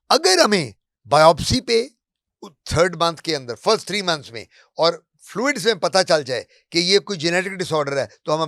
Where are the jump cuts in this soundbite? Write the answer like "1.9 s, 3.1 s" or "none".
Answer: none